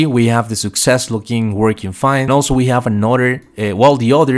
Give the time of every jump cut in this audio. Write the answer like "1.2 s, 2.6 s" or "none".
2.3 s